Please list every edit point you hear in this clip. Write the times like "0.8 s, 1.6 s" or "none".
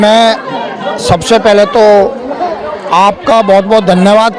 none